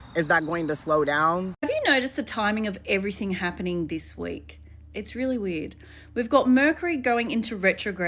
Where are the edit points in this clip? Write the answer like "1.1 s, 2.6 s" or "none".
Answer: 1.5 s